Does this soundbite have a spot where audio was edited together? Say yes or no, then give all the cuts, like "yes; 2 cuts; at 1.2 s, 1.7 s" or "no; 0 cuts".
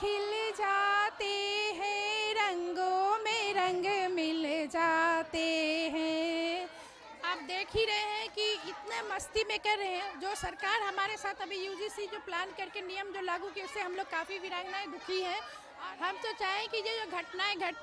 yes; 2 cuts; at 7.1 s, 15.6 s